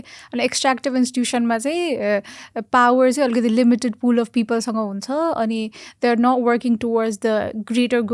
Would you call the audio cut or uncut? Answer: uncut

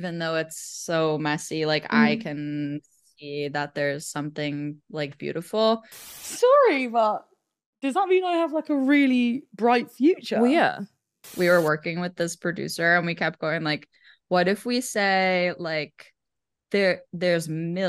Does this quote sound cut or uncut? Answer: cut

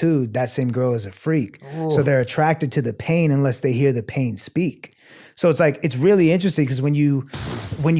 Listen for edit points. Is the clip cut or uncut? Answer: uncut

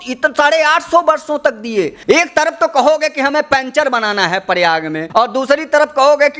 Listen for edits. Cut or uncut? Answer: cut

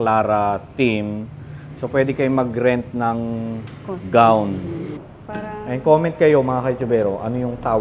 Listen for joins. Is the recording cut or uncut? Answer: cut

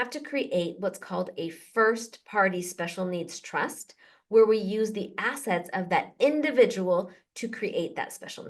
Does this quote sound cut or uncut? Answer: uncut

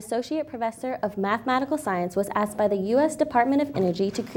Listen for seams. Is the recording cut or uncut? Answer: uncut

